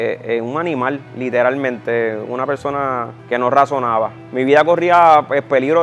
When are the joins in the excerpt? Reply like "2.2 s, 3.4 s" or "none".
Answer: 3.1 s, 4.2 s